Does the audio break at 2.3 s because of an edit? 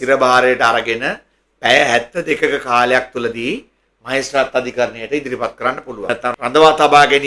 no; 1 cut; at 6.0 s

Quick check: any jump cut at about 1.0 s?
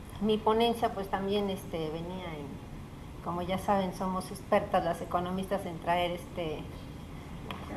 yes; 1 cut; at 1.0 s

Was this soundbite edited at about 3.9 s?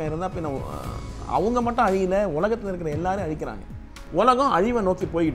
yes; 1 cut; at 3.9 s

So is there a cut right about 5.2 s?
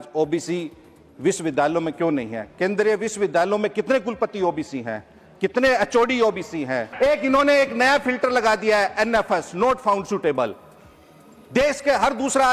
no; 1 cut; at 6.9 s

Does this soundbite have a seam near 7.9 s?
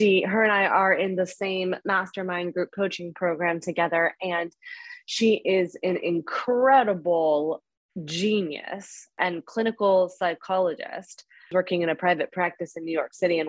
no; 2 cuts; at 9.2 s, 11.5 s

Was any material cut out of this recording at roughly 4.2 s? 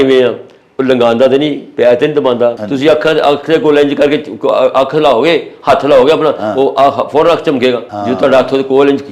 no; 2 cuts; at 2.6 s, 7.9 s

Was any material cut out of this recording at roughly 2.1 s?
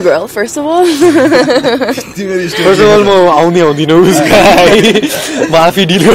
no; 0 cuts

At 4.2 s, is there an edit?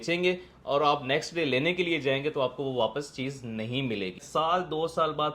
yes; 1 cut; at 4.2 s

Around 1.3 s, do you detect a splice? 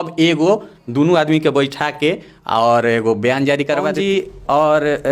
no; 1 cut; at 4.0 s

